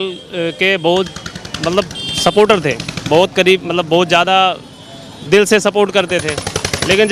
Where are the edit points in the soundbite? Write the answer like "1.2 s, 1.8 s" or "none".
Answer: none